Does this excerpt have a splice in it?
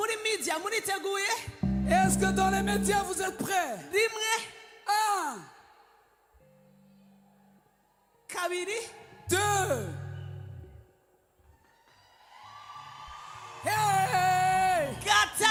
no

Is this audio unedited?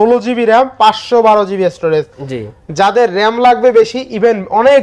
yes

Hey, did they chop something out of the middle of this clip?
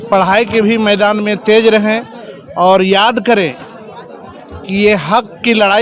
no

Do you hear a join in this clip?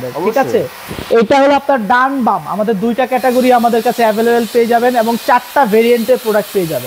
no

